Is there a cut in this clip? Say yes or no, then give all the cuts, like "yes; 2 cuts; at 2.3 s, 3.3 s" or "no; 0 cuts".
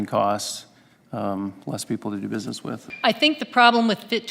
yes; 1 cut; at 2.9 s